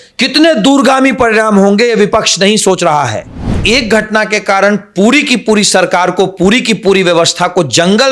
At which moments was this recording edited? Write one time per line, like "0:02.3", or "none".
0:03.6